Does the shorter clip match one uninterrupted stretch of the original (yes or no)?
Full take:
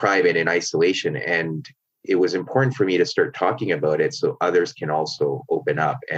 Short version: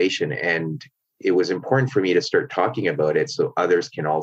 yes